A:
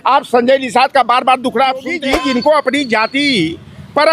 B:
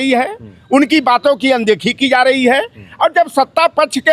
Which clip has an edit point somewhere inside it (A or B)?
A